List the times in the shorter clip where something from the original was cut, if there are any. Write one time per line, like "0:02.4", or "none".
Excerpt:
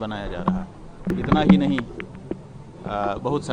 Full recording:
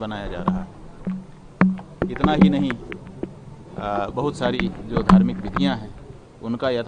0:01.0

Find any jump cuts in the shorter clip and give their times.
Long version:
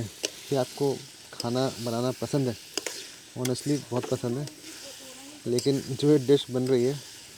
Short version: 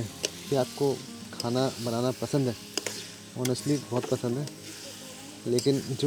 none

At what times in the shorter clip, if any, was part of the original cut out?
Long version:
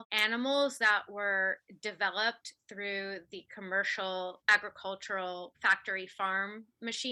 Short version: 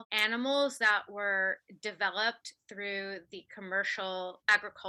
none

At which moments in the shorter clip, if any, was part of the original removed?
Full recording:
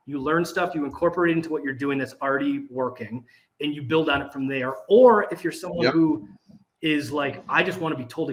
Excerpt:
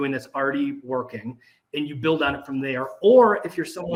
none

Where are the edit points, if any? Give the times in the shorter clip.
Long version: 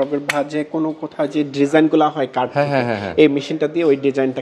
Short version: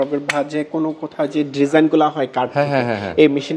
none

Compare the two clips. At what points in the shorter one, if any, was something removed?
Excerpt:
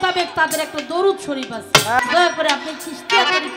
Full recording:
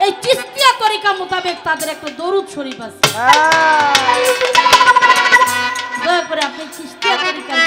0:01.9

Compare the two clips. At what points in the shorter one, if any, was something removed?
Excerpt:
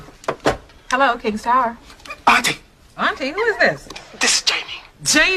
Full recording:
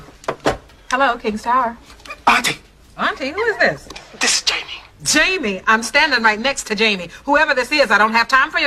none

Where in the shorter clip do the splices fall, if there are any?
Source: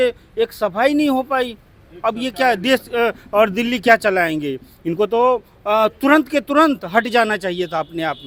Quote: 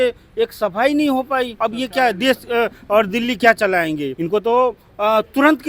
0:01.5
0:04.1

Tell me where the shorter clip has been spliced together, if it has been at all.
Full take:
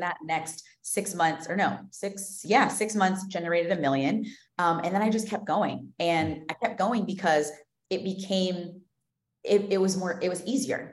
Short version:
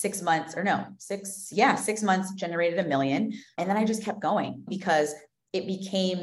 0:03.6
0:04.7

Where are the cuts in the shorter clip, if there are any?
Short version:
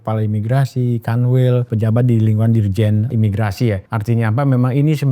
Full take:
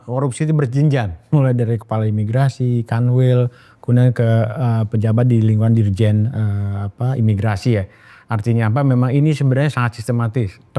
0:01.7
0:03.1
0:03.9

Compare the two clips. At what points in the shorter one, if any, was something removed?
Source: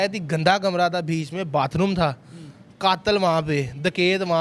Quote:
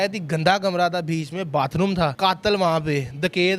0:02.1

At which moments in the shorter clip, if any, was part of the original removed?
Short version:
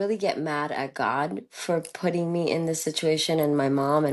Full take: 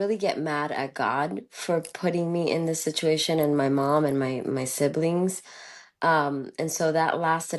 none

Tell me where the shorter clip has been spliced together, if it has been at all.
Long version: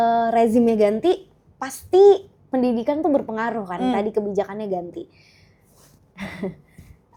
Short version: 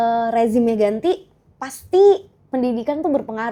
none

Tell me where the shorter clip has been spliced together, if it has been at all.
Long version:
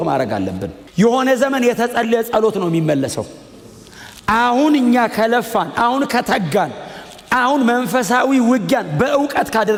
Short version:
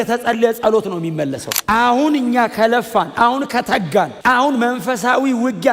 0:01.5
0:04.1

